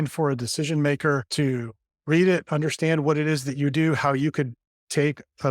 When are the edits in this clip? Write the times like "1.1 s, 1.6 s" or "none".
1.3 s